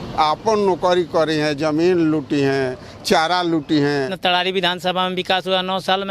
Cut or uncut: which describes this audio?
cut